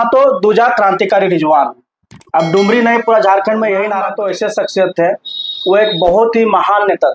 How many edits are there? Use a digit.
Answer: 1